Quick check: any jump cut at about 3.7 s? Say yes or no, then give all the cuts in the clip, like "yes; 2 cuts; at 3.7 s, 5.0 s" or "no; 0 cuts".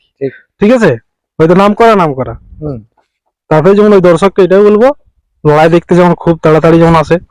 no; 0 cuts